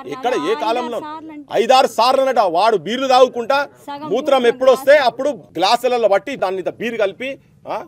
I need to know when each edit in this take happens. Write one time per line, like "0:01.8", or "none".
0:05.5
0:06.3